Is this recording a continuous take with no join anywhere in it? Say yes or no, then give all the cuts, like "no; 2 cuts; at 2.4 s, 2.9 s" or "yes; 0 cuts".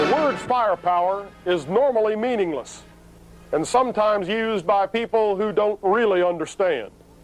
no; 1 cut; at 1.7 s